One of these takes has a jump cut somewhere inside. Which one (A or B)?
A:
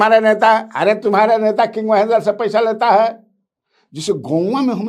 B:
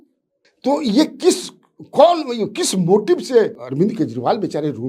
B